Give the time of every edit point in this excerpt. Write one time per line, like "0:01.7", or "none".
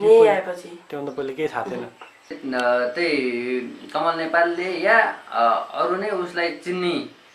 0:02.4